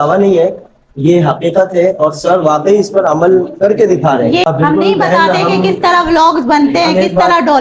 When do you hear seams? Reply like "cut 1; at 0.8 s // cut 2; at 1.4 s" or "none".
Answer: cut 1; at 4.5 s